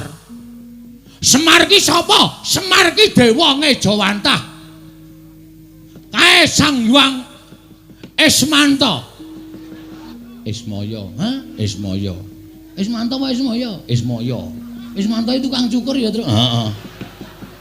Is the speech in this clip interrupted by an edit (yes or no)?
yes